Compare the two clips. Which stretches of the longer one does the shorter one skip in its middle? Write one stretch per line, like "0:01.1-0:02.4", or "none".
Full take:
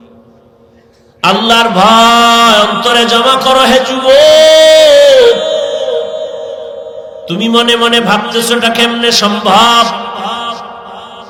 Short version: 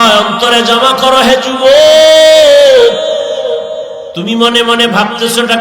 0:06.5-0:07.2